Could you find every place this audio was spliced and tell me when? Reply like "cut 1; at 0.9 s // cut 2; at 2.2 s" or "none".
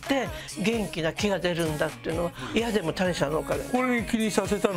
cut 1; at 2.4 s